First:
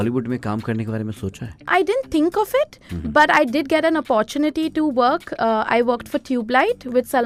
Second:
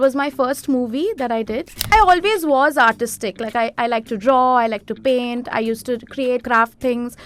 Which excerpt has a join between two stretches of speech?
second; 2 cuts; at 1.9 s, 6.4 s

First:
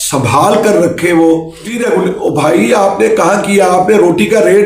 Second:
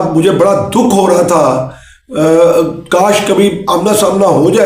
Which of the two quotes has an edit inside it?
first; 1 cut; at 1.8 s

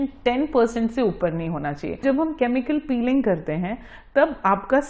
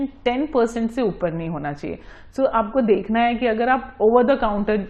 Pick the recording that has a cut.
first; 1 cut; at 2.0 s

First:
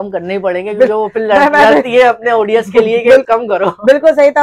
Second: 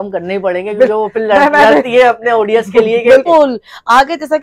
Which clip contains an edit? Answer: second; 1 cut; at 3.3 s

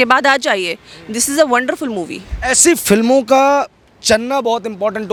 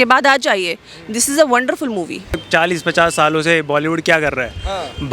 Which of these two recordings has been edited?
second; 1 cut; at 2.4 s

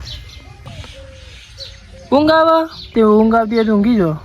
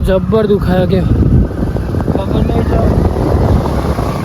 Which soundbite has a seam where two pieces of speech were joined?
first; 2 cuts; at 0.7 s, 2.8 s

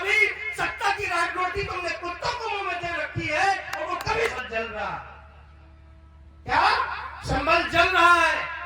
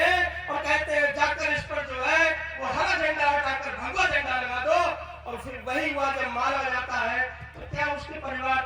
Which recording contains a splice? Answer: first; 1 cut; at 4.3 s

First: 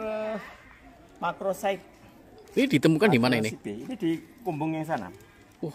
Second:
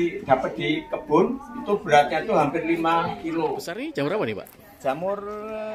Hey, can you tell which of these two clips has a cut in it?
second; 1 cut; at 3.7 s

